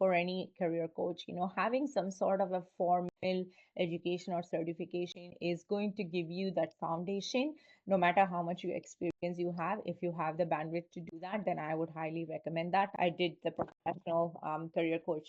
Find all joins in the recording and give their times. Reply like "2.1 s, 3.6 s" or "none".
none